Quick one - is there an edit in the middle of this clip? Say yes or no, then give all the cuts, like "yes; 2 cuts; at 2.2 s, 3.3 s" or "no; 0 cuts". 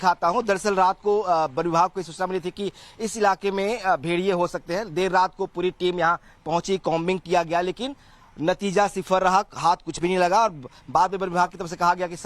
no; 0 cuts